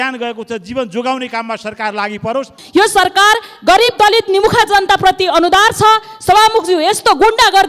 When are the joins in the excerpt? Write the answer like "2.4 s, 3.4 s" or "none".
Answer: 2.6 s